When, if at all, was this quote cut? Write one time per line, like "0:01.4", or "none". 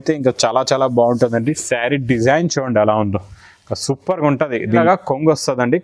0:04.8